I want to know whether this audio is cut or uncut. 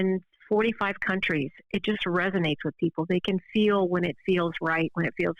uncut